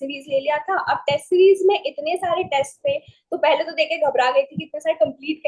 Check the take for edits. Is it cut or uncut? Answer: uncut